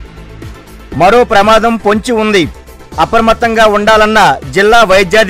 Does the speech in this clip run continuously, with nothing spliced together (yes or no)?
yes